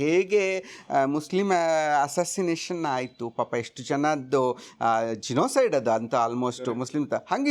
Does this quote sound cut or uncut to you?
uncut